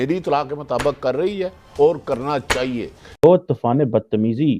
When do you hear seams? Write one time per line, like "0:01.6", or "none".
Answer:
0:03.2